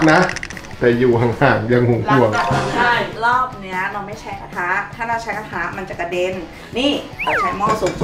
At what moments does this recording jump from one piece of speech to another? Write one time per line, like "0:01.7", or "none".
none